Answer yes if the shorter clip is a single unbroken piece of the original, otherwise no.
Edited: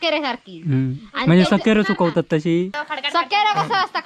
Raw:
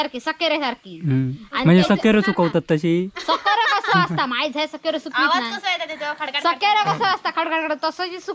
no